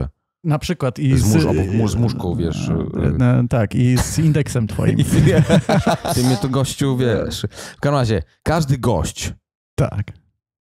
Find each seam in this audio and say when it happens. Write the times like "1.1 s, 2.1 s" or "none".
6.0 s